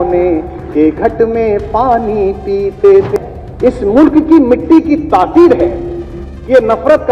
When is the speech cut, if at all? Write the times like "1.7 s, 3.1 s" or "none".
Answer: 3.2 s